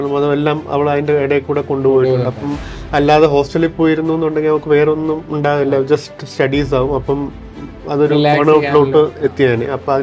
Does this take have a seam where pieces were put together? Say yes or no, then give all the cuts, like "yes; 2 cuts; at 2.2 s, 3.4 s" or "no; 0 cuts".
no; 0 cuts